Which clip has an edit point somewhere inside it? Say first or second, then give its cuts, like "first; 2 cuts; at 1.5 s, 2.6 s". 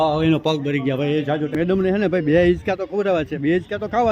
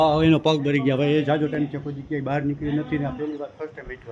first; 1 cut; at 1.6 s